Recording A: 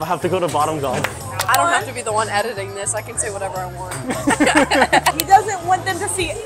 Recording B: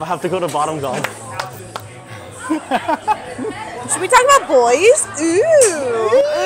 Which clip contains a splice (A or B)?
A